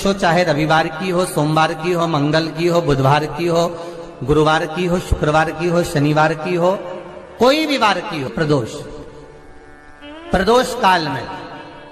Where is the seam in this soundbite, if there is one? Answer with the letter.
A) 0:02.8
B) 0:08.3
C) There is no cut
B